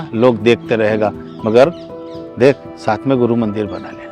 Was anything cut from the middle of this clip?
no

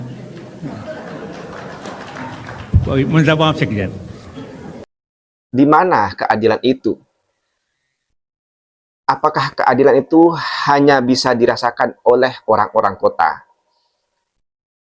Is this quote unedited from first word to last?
no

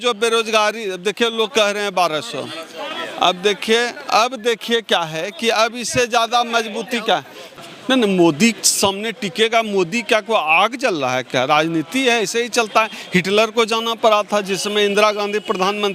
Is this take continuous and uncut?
no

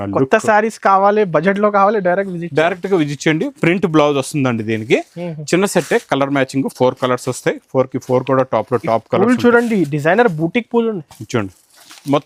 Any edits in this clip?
no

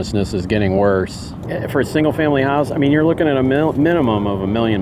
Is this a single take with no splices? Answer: no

